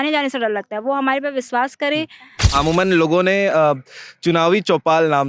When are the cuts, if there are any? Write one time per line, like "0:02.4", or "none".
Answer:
0:02.4